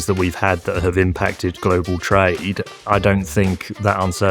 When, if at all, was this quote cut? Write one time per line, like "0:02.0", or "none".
0:02.8